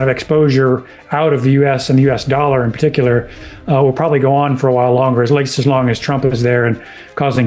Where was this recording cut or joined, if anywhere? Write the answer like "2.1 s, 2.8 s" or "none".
none